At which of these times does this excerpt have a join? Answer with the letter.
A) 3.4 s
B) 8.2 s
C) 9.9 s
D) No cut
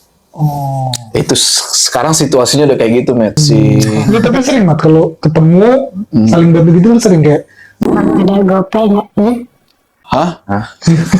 A